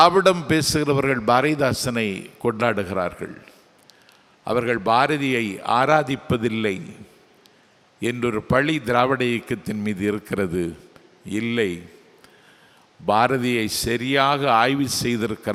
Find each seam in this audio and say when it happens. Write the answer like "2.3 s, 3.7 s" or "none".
none